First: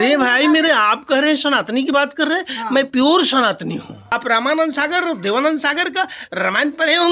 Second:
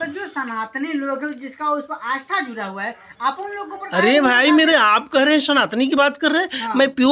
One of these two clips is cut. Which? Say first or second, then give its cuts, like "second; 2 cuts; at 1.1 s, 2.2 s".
first; 1 cut; at 4.0 s